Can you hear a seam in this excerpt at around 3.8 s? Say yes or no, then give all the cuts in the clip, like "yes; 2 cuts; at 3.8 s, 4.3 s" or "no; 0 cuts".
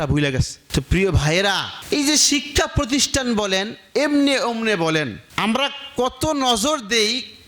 no; 1 cut; at 5.2 s